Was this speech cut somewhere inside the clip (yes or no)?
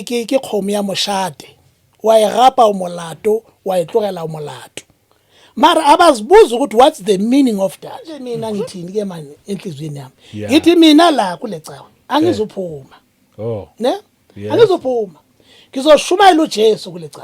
yes